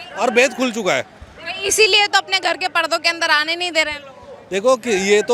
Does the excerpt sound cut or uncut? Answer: uncut